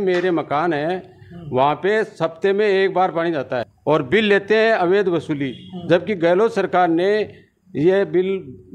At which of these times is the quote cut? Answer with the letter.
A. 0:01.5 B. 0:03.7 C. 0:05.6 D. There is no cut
B